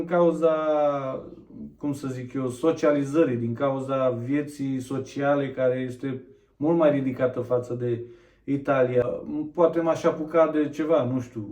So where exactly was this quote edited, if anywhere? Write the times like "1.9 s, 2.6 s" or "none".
9.0 s